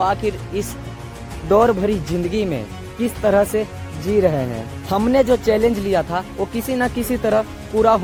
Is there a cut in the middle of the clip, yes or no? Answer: no